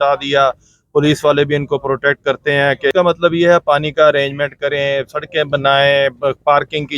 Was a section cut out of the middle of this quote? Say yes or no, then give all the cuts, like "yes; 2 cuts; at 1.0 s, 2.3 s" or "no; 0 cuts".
yes; 1 cut; at 2.9 s